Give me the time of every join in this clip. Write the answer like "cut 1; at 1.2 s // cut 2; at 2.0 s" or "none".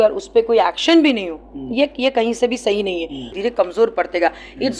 cut 1; at 3.4 s

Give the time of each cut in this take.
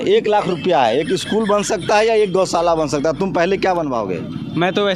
none

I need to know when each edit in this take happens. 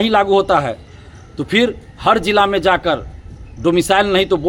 none

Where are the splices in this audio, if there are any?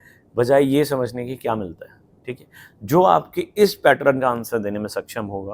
none

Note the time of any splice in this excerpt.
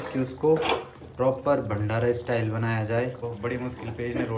cut 1; at 3.2 s

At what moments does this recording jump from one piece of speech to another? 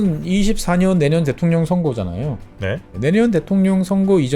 cut 1; at 2.9 s

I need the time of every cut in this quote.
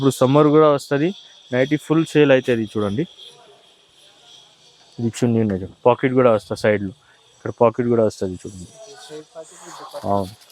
none

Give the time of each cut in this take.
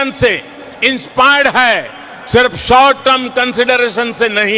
cut 1; at 2.7 s

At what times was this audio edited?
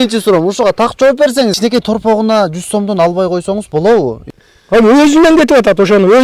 cut 1; at 1.6 s // cut 2; at 4.2 s

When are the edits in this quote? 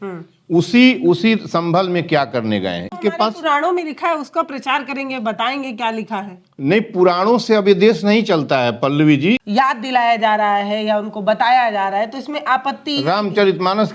cut 1; at 2.9 s // cut 2; at 9.4 s

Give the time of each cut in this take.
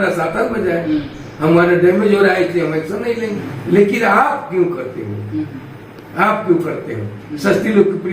cut 1; at 3.4 s

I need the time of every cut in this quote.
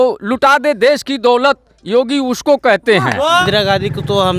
cut 1; at 3.3 s

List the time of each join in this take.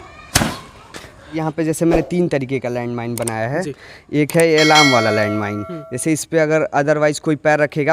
cut 1; at 1.3 s

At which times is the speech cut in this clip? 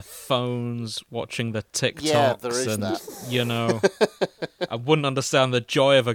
none

